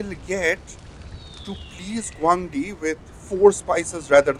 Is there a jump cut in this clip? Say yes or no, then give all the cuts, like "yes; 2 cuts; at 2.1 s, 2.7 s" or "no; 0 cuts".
no; 0 cuts